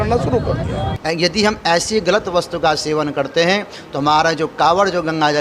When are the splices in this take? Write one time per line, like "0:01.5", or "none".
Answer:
0:00.9